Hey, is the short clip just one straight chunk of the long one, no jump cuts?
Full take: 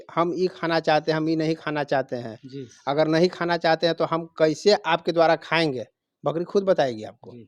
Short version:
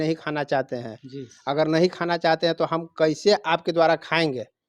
yes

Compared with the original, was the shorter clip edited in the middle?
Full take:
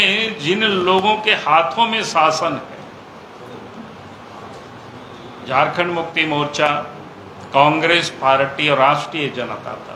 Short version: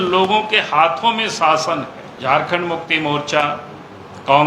yes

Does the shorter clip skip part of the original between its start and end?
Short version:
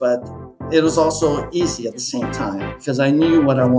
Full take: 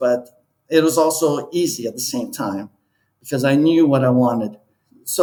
yes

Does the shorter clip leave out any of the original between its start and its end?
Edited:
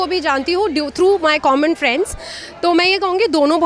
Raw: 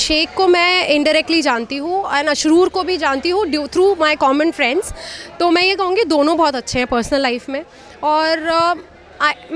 no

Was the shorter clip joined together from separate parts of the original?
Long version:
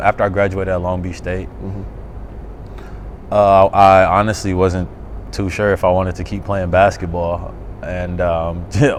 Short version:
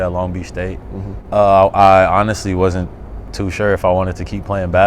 yes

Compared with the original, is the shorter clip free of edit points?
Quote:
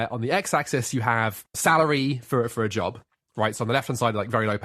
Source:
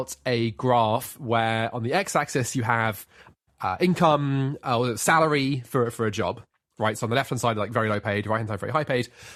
no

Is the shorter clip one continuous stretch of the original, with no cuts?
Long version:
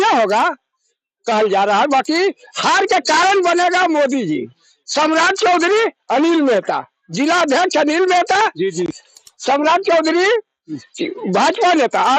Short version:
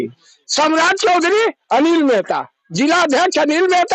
yes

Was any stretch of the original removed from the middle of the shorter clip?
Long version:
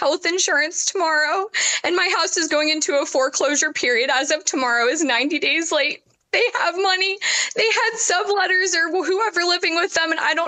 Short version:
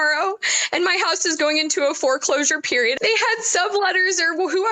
yes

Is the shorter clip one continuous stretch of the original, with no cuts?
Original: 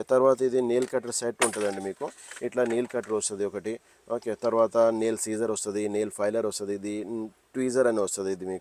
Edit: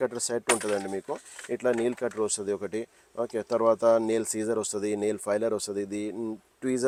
yes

